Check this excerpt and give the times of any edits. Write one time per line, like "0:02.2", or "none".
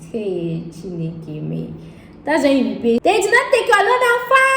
0:03.0

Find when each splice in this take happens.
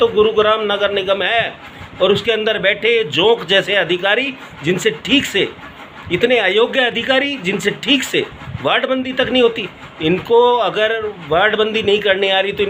none

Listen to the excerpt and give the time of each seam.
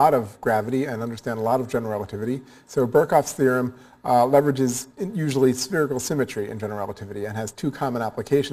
none

